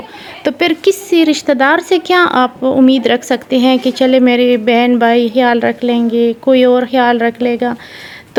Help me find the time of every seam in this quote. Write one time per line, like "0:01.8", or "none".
none